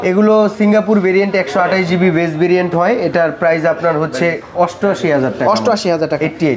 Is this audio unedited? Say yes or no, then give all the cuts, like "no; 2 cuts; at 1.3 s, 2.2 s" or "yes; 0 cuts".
yes; 0 cuts